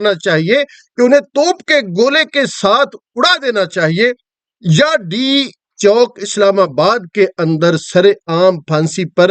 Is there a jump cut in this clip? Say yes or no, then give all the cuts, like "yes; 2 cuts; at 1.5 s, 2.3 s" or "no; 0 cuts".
no; 0 cuts